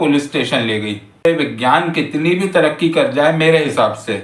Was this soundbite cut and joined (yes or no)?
yes